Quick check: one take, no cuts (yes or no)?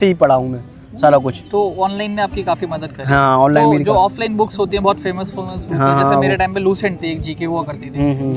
yes